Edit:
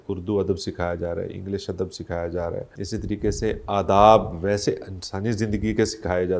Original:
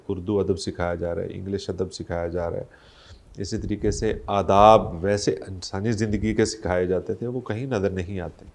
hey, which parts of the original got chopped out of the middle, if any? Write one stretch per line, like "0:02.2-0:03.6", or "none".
0:02.7-0:03.3